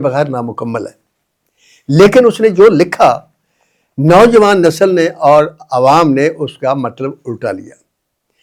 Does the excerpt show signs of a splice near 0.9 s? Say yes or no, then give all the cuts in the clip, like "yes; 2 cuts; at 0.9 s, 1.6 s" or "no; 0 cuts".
no; 0 cuts